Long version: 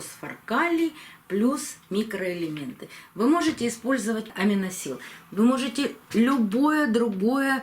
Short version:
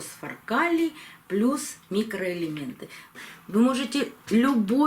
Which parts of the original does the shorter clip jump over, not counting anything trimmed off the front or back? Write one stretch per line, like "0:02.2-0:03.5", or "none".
0:03.0-0:04.9